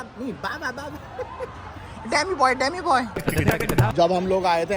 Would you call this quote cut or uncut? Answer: uncut